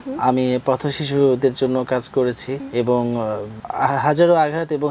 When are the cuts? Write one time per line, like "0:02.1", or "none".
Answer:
0:02.5
0:03.6